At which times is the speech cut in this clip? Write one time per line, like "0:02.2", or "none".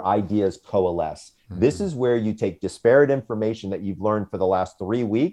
none